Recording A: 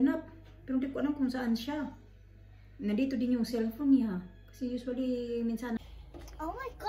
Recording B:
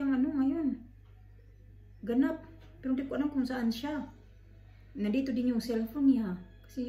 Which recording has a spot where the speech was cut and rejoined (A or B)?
A